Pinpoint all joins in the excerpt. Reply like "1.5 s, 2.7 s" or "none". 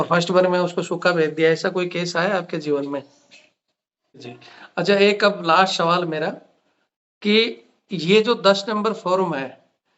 4.3 s